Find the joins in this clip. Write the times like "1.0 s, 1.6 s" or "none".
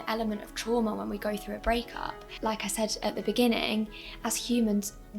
2.3 s